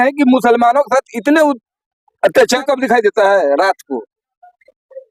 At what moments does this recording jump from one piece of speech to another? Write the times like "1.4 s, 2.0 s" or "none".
2.6 s